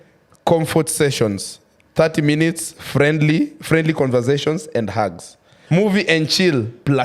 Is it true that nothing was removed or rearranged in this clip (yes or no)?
no